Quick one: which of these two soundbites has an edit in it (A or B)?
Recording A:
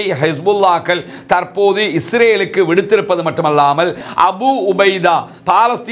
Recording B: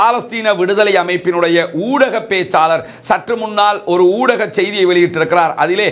A